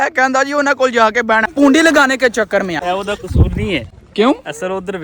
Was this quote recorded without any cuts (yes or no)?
no